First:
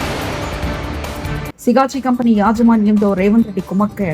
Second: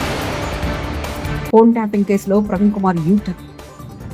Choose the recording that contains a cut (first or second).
first